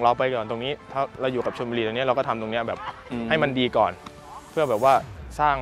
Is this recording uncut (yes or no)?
yes